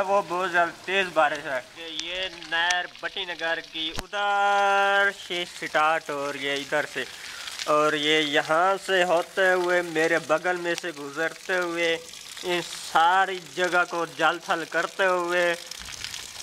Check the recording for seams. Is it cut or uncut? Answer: cut